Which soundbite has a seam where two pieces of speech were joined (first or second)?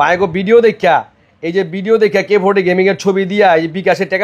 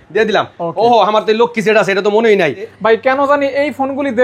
second